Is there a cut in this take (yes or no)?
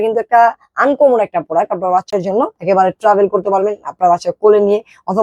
no